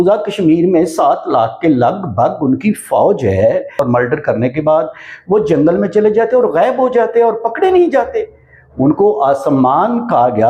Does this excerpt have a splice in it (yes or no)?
yes